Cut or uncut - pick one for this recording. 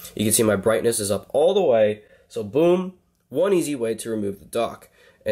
uncut